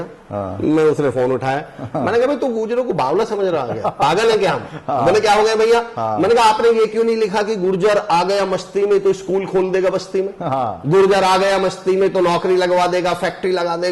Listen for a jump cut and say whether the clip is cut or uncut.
uncut